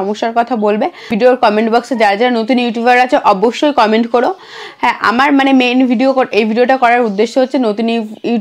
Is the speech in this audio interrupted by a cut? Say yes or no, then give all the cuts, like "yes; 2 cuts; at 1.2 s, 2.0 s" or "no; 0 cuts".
yes; 1 cut; at 1.1 s